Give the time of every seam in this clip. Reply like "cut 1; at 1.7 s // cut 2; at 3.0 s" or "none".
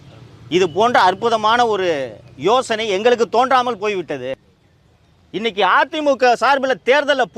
cut 1; at 4.3 s